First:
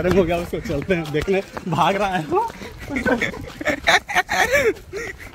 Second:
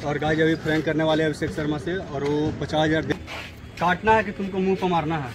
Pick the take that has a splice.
second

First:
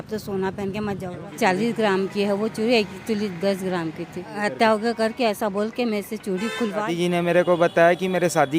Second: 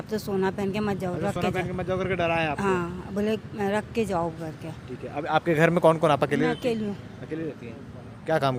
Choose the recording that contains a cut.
first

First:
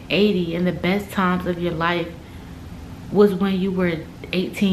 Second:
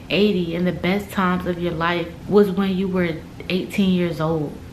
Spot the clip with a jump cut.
second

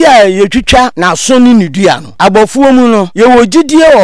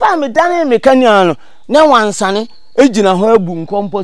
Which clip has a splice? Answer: first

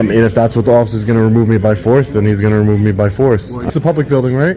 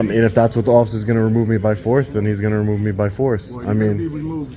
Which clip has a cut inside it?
first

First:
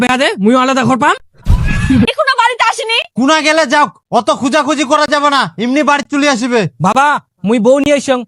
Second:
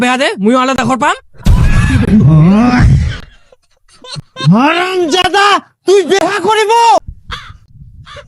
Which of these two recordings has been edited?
first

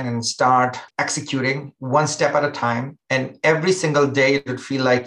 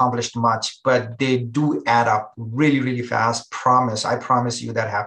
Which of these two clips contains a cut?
first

